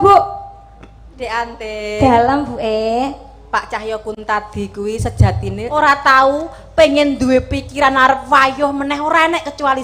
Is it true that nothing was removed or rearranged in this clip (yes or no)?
no